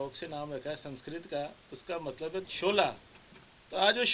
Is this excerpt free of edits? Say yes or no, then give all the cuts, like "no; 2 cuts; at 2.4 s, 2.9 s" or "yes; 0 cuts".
yes; 0 cuts